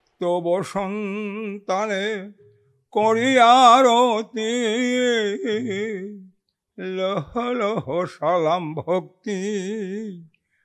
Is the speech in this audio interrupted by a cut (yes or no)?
no